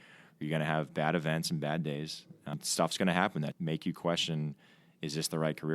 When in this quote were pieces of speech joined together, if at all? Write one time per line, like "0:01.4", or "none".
0:02.2
0:03.5